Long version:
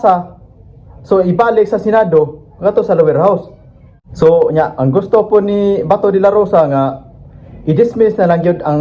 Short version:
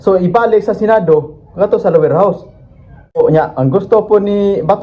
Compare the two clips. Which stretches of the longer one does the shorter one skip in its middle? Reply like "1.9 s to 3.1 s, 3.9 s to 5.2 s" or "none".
4.2 s to 4.4 s